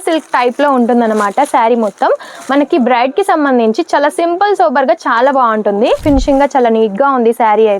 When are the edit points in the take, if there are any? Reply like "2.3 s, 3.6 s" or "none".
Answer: 6.0 s